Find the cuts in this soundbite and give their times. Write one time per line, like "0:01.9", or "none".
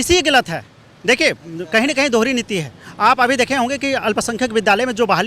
none